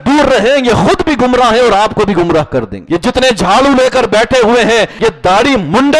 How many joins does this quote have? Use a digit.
2